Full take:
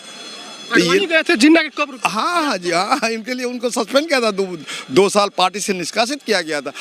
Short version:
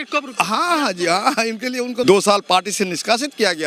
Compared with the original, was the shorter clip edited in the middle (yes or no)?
yes